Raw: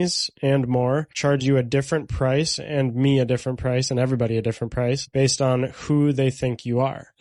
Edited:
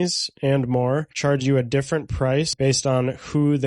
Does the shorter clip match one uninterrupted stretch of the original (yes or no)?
no